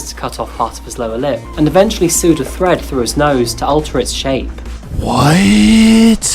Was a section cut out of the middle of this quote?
yes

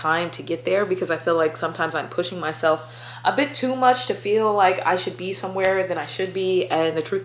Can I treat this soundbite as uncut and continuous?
yes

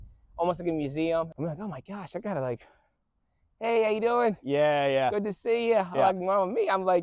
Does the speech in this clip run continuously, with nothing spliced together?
no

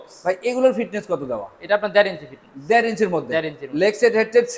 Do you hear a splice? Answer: no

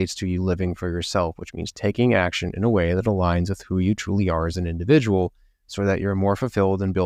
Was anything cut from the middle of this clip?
no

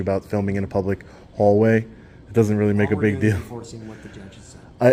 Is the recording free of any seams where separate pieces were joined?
yes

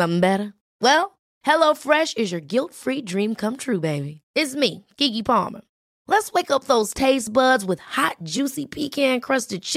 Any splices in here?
no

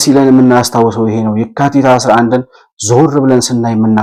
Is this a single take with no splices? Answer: yes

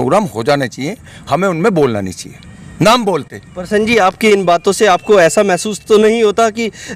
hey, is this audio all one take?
yes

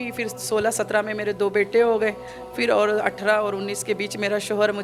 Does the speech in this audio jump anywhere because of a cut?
no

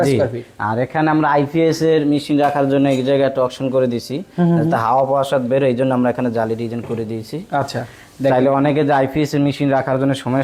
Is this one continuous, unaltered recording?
yes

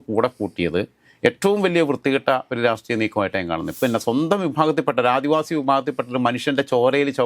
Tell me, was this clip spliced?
yes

